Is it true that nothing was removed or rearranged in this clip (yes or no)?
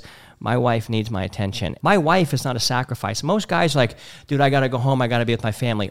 no